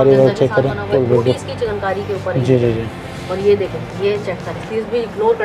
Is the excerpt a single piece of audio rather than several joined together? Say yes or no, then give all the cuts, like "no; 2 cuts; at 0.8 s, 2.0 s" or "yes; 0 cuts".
no; 2 cuts; at 0.9 s, 4.7 s